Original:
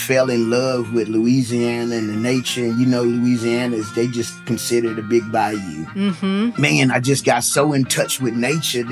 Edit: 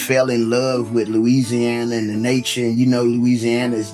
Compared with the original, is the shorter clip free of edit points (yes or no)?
yes